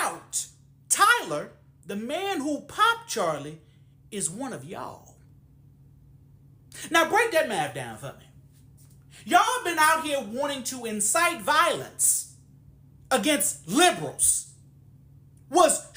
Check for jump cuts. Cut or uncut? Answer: uncut